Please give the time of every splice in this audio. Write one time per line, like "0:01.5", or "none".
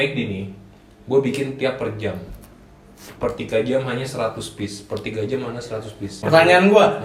none